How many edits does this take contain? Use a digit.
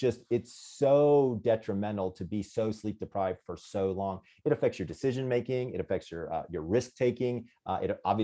0